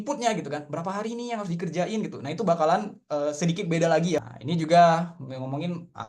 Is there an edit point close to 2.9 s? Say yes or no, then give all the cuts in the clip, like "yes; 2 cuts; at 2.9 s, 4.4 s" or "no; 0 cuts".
no; 1 cut; at 4.2 s